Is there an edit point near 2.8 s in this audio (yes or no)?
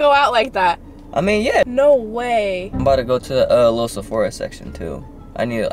yes